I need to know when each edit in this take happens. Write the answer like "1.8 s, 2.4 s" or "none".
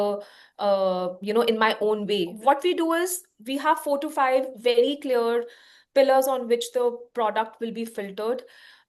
2.3 s